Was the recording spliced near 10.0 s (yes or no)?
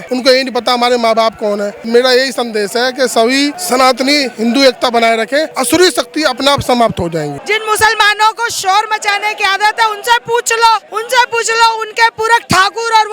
no